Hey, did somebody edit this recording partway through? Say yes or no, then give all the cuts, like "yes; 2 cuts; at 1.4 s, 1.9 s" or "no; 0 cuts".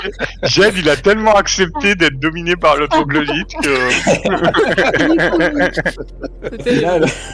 no; 0 cuts